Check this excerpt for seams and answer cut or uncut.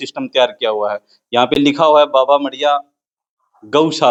uncut